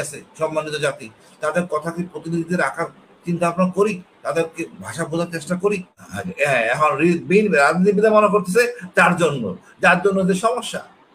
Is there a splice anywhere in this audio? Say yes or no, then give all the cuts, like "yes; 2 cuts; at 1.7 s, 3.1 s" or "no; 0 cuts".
yes; 1 cut; at 6.0 s